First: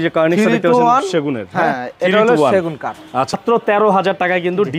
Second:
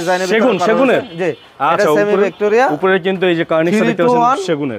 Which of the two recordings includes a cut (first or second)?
first